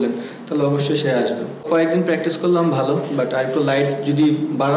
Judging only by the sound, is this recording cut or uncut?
cut